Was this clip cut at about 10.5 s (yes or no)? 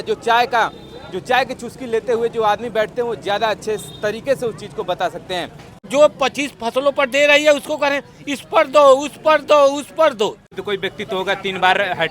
yes